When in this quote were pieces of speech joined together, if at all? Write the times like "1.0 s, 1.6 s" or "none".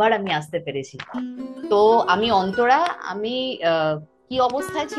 1.5 s